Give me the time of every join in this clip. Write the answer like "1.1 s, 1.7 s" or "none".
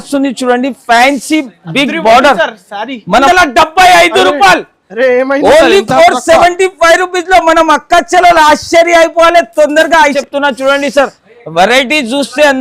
3.3 s, 10.2 s